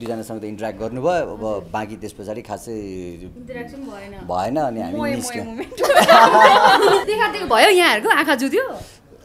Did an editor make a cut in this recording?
yes; 1 cut; at 7.0 s

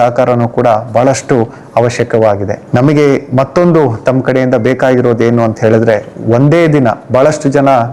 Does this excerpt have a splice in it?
no; 0 cuts

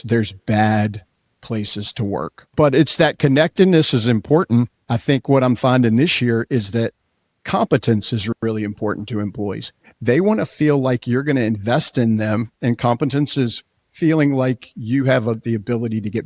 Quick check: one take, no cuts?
no; 2 cuts; at 2.4 s, 4.9 s

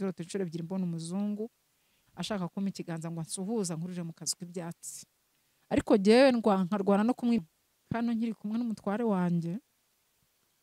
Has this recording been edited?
yes; 1 cut; at 7.4 s

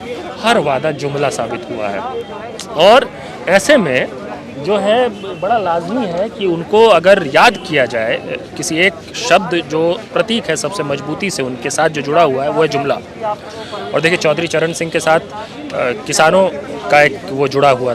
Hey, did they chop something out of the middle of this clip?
no; 0 cuts

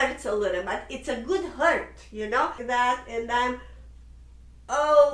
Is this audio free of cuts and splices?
no; 1 cut; at 2.6 s

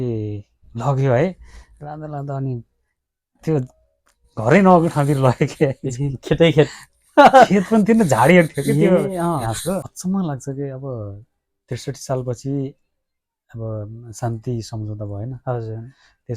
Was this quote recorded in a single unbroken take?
no; 1 cut; at 9.9 s

